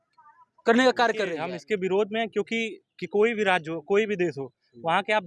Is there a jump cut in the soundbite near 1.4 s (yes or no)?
yes